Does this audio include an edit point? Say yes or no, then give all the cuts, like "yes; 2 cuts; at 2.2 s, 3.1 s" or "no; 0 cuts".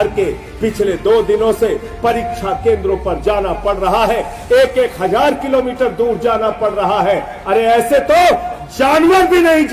no; 0 cuts